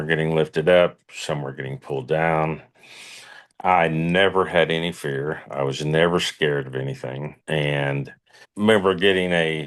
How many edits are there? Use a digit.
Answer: 1